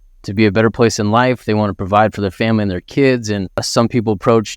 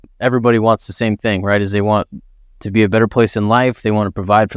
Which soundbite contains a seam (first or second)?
first